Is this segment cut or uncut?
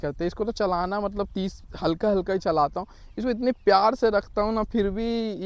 uncut